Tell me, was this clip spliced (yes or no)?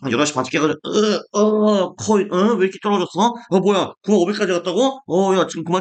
no